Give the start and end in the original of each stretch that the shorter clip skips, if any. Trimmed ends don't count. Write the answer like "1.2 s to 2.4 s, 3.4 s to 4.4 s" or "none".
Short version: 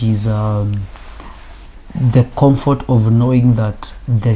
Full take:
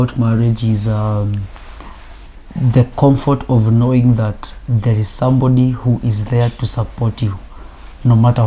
none